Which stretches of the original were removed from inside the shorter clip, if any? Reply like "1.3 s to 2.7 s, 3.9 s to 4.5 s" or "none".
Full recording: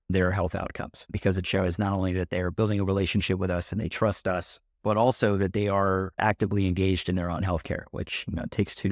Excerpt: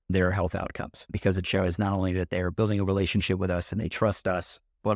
none